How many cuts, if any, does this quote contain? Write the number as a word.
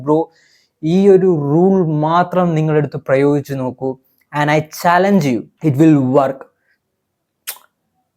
one